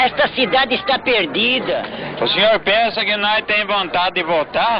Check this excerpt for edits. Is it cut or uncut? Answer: cut